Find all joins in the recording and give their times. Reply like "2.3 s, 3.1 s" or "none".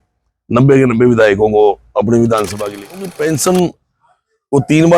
3.0 s